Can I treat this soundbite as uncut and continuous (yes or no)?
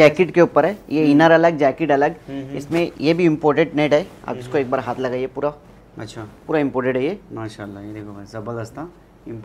yes